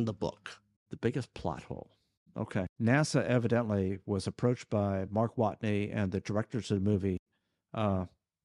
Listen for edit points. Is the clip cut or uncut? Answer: cut